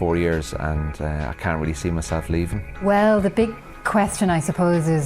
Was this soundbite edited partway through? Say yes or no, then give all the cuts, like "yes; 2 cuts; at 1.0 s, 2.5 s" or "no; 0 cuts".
yes; 1 cut; at 2.7 s